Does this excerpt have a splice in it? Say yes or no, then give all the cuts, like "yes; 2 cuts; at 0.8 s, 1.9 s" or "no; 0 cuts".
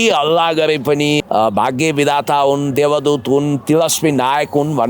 yes; 1 cut; at 1.2 s